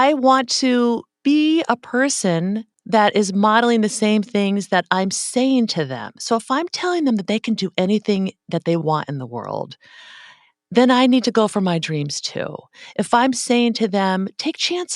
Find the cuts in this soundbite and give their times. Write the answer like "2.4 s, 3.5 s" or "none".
1.1 s, 2.7 s

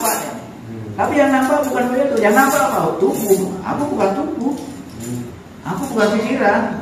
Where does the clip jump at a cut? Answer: 5.4 s

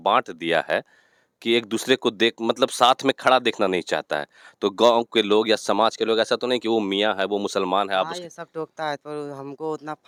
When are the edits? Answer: none

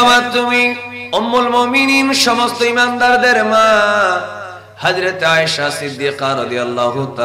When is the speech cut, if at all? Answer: 0.9 s

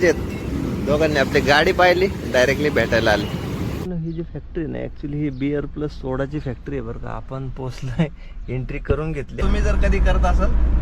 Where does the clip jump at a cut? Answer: 3.9 s, 9.4 s

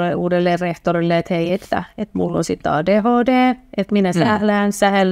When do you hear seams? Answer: none

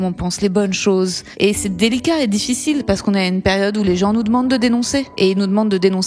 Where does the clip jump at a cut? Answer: 1.2 s, 5.1 s

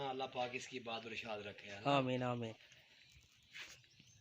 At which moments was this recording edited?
2.6 s

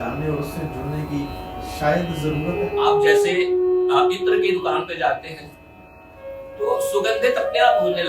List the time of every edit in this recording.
2.6 s

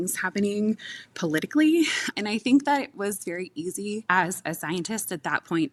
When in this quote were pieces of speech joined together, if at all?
none

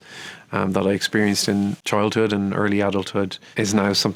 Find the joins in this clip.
none

